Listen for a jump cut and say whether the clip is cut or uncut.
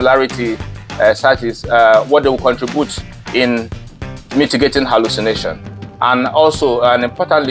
uncut